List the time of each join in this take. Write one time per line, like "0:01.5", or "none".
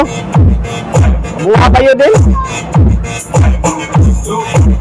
none

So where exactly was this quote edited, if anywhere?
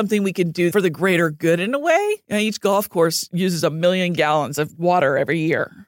0:00.7
0:02.2

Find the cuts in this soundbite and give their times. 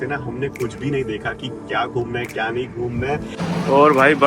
0:03.3

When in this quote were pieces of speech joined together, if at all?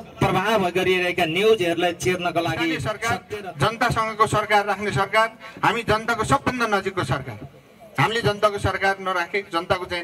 0:02.9

